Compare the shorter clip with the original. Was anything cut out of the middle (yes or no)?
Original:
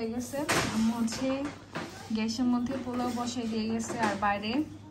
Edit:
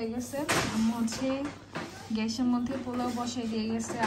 no